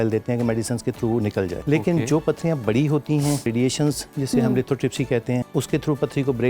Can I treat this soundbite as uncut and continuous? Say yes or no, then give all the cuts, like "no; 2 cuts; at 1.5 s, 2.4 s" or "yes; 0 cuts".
no; 3 cuts; at 1.6 s, 3.5 s, 5.5 s